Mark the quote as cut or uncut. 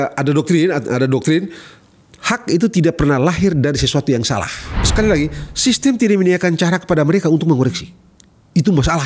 cut